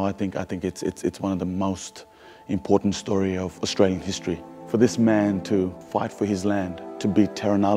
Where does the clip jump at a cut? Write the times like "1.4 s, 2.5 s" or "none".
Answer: 4.5 s, 5.8 s, 6.9 s